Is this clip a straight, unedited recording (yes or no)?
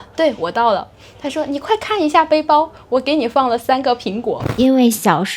no